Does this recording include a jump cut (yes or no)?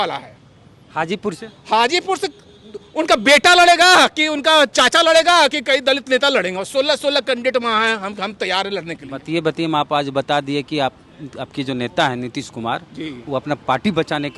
no